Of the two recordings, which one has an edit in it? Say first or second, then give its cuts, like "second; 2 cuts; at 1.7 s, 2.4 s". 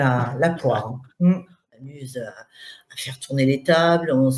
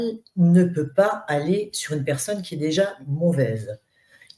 first; 1 cut; at 1.8 s